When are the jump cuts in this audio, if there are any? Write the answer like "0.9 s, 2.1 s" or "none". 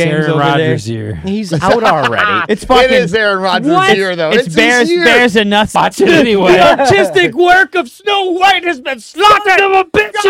5.8 s